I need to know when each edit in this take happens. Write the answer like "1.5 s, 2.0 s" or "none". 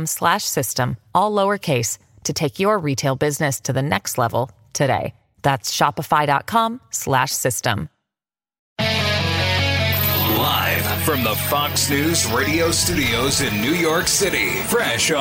8.5 s, 10.2 s